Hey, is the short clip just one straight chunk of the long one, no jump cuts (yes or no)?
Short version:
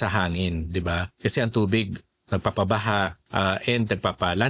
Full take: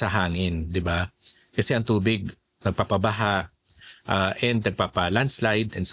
no